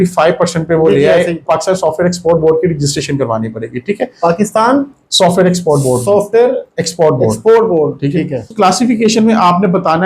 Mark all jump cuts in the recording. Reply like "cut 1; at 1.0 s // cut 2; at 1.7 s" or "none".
cut 1; at 1.4 s // cut 2; at 8.5 s